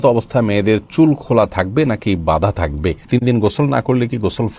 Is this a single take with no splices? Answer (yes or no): no